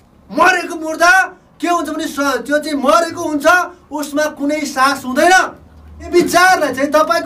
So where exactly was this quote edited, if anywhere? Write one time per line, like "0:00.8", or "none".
0:06.1